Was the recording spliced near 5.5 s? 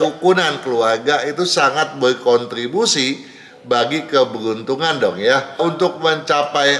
yes; 1 cut; at 5.5 s

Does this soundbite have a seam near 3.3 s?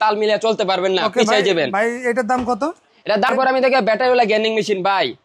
yes; 1 cut; at 3.3 s

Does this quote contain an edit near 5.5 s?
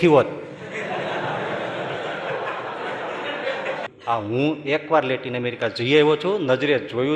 no; 1 cut; at 3.8 s

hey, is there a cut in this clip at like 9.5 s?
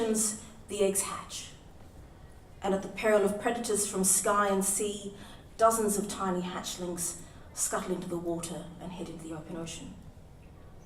no; 1 cut; at 6.4 s

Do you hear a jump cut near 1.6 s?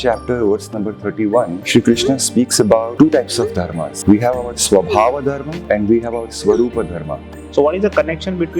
yes; 5 cuts; at 1.6 s, 2.9 s, 3.8 s, 5.5 s, 7.4 s

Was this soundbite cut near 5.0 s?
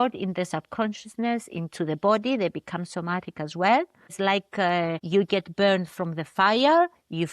yes; 2 cuts; at 4.1 s, 5.0 s

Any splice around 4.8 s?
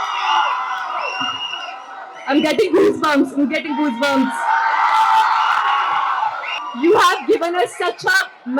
no; 1 cut; at 6.5 s

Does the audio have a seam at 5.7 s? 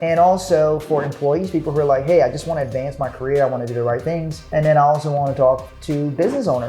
yes; 2 cuts; at 4.5 s, 5.7 s

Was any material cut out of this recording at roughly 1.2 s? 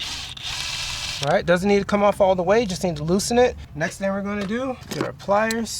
yes; 3 cuts; at 1.2 s, 3.7 s, 4.9 s

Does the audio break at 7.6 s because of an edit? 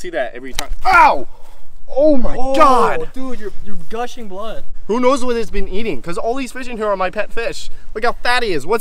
no; 1 cut; at 4.7 s

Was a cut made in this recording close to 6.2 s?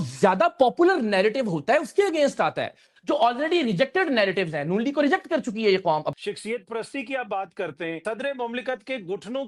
yes; 2 cuts; at 6.2 s, 8.0 s

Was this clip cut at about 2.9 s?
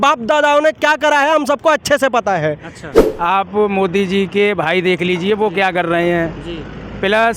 yes; 1 cut; at 2.9 s

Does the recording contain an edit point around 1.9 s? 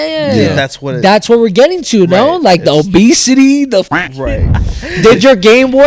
no; 1 cut; at 4.2 s

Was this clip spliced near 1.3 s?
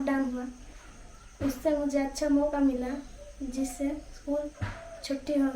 no; 0 cuts

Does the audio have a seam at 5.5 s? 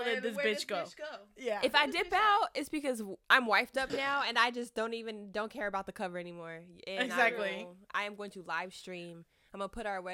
no; 1 cut; at 3.1 s

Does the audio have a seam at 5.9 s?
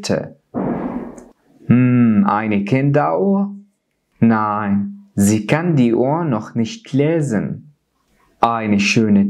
no; 1 cut; at 1.2 s

